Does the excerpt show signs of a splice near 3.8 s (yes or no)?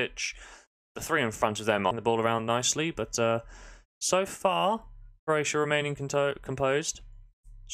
no